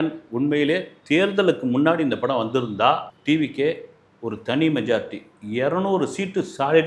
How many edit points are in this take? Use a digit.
1